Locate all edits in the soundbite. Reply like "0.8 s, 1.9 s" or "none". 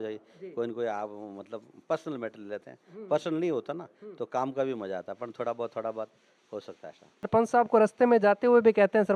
7.3 s